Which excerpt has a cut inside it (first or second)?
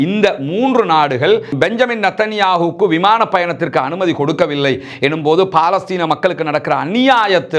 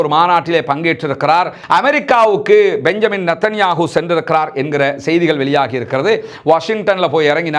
second